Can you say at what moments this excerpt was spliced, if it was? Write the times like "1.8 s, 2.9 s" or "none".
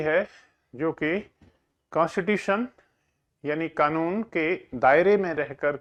none